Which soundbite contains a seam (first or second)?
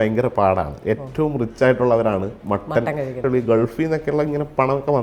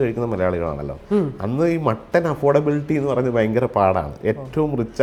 first